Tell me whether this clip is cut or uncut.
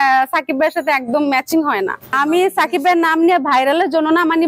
cut